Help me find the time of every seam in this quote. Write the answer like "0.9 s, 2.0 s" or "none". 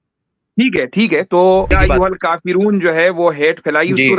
1.7 s